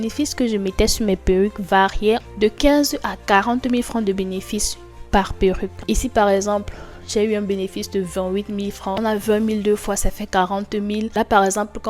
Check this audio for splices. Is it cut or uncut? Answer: cut